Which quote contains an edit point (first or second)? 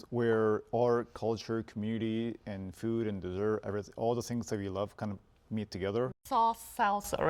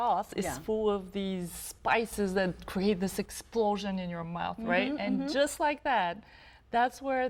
first